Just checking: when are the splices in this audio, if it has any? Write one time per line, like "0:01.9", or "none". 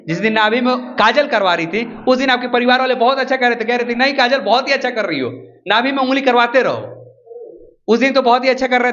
none